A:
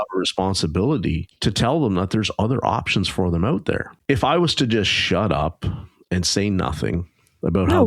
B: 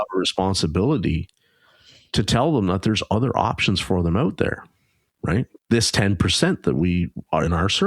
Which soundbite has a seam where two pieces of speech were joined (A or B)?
A